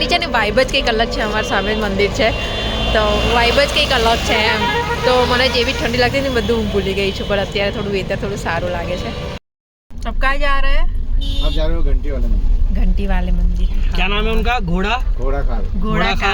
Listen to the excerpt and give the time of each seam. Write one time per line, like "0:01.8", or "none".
none